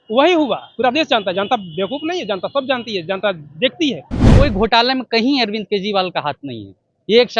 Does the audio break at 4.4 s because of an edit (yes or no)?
yes